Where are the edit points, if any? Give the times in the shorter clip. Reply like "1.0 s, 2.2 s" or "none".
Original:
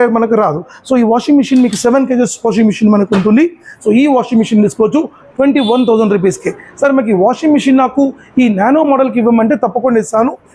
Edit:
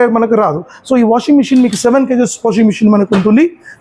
none